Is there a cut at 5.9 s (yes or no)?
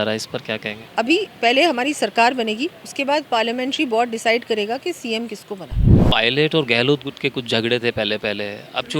yes